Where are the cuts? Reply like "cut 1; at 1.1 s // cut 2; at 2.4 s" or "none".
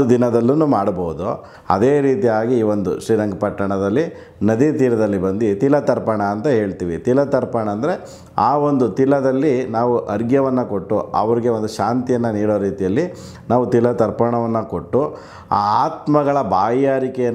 cut 1; at 1.5 s